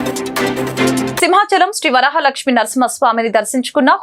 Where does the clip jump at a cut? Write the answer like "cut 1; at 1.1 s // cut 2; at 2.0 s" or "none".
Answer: cut 1; at 1.1 s